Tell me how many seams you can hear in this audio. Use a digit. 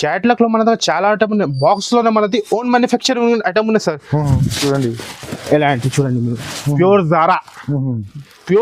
1